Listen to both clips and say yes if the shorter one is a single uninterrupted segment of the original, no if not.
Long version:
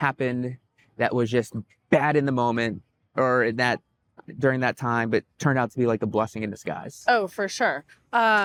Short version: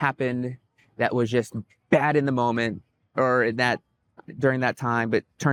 yes